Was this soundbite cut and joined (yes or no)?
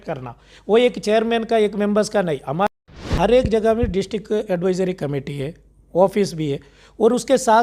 yes